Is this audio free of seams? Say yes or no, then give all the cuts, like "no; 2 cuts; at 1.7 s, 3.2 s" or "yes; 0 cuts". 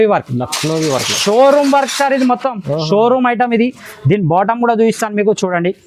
yes; 0 cuts